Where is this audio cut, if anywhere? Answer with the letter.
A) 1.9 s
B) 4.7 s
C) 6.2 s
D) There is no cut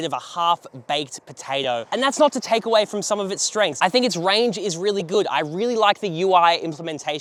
D